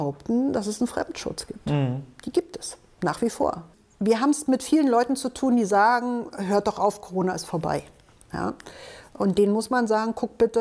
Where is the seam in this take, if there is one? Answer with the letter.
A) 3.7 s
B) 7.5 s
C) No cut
A